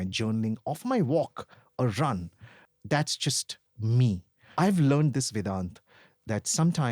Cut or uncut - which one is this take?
cut